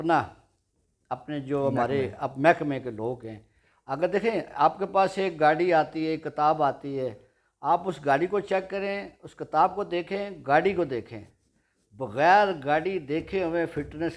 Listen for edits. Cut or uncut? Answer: uncut